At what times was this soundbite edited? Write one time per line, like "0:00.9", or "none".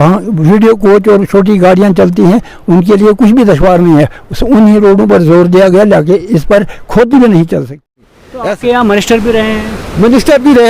0:07.9